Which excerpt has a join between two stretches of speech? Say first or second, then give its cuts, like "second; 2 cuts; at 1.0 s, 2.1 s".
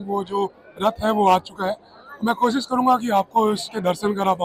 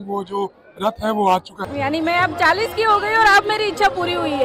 second; 1 cut; at 1.7 s